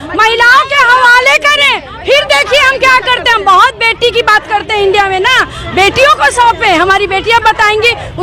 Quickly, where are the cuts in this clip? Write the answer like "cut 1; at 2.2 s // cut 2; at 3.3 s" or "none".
none